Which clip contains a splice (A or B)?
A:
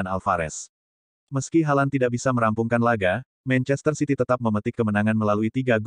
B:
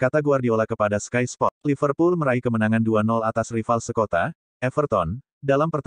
B